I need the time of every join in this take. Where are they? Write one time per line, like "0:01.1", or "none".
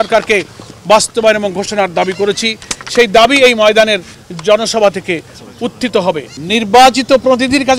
0:06.3